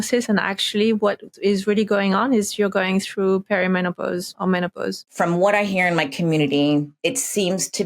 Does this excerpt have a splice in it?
yes; 3 cuts; at 4.3 s, 5.1 s, 6.9 s

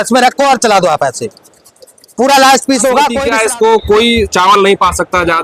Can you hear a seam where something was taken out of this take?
yes; 1 cut; at 3.2 s

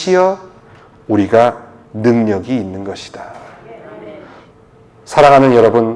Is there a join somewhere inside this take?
yes; 1 cut; at 4.4 s

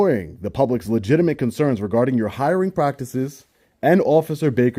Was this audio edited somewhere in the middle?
no; 0 cuts

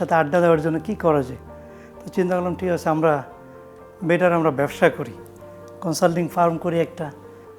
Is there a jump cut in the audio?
no; 0 cuts

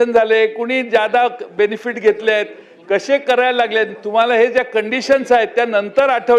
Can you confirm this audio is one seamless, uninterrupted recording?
yes; 0 cuts

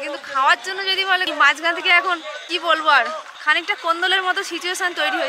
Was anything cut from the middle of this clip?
yes; 2 cuts; at 1.3 s, 3.3 s

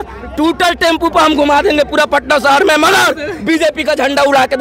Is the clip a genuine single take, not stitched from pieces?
yes; 0 cuts

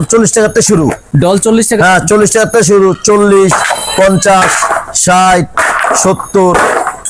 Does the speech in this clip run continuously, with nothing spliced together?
yes; 0 cuts

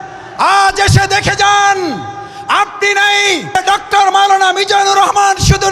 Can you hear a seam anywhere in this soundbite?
yes; 1 cut; at 3.5 s

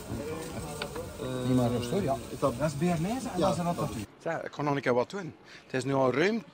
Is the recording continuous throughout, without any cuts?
yes; 0 cuts

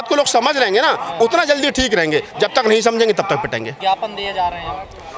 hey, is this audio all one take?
yes; 0 cuts

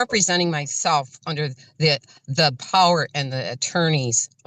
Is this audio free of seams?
yes; 0 cuts

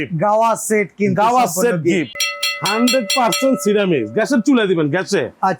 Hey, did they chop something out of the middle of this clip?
yes; 1 cut; at 2.1 s

